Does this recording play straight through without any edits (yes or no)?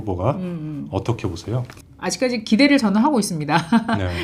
no